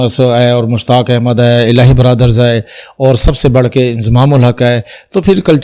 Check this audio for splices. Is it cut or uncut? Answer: uncut